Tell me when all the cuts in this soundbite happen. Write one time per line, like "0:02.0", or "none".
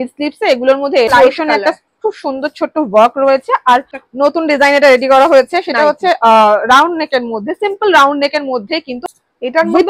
0:01.1
0:04.0
0:08.9